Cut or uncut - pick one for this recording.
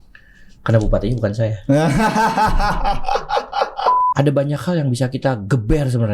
cut